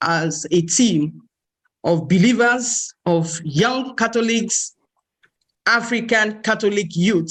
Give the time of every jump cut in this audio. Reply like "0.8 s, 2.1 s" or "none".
none

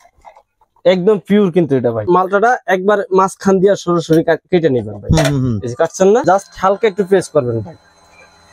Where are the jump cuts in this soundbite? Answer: 2.0 s, 6.2 s

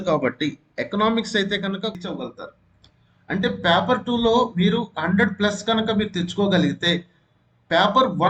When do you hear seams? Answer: 2.0 s

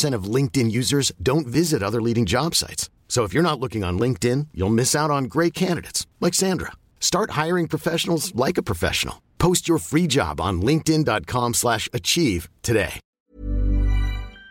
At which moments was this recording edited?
13.0 s

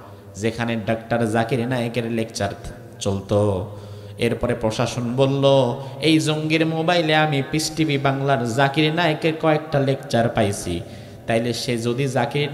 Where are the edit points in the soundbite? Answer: none

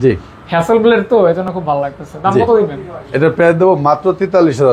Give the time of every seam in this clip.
none

